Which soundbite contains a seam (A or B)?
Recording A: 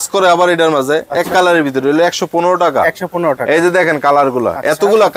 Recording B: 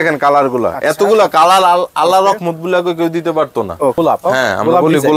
B